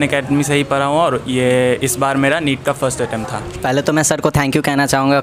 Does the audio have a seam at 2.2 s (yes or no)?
no